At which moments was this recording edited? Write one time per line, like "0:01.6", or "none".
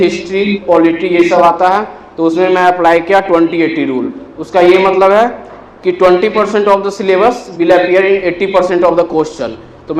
none